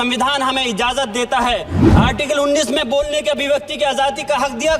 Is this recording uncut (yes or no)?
no